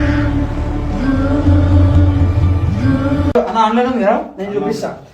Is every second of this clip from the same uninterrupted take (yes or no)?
yes